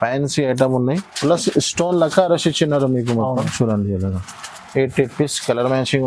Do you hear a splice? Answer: yes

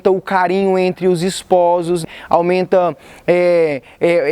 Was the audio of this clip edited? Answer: yes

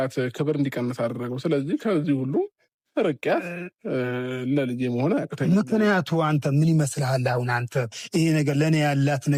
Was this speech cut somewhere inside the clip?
no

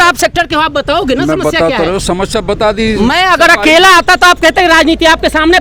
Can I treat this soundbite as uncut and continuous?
yes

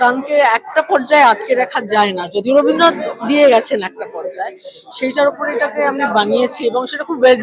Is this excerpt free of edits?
yes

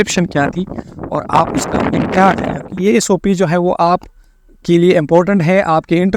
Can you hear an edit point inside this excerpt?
yes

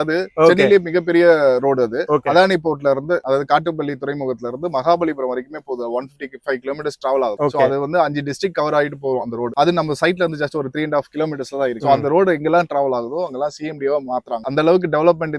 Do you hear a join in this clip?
no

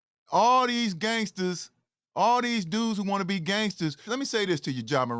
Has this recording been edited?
yes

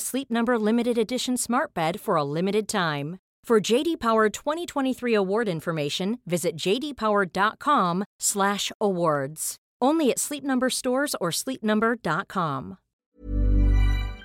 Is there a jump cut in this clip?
yes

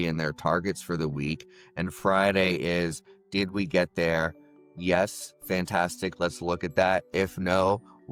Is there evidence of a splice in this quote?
no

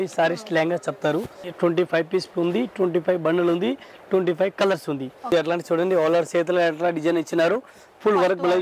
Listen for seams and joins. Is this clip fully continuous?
no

